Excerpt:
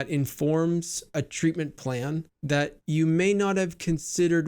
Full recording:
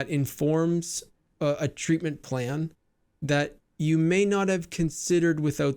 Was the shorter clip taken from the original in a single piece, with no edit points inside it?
no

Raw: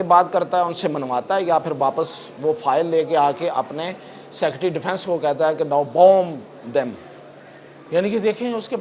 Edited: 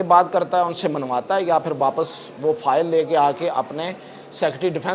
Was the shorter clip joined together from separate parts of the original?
no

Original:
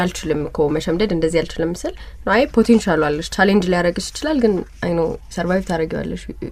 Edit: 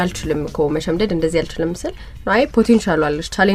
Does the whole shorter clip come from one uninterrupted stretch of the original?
yes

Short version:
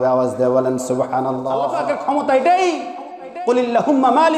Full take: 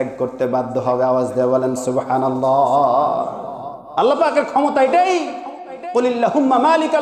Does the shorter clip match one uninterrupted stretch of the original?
no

